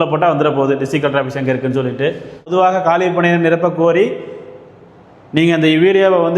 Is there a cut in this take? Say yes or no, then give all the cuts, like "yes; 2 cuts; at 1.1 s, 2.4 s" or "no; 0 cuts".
yes; 1 cut; at 2.5 s